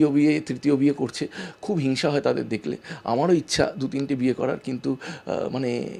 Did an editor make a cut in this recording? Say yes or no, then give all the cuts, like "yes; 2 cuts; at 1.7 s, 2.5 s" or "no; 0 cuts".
no; 0 cuts